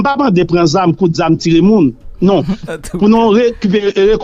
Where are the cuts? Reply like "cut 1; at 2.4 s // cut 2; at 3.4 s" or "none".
cut 1; at 2.6 s